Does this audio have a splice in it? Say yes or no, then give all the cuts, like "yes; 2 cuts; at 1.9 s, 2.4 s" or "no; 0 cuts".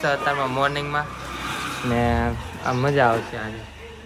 no; 0 cuts